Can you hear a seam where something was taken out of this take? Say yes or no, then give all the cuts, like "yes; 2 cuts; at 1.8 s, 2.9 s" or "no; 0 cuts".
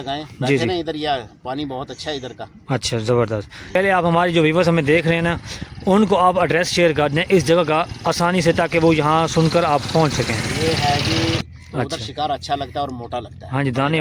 yes; 2 cuts; at 3.8 s, 11.5 s